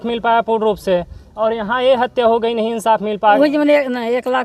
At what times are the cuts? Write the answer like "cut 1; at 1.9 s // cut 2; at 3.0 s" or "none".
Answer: cut 1; at 3.4 s